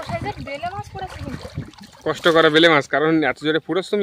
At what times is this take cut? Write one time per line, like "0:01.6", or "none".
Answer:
none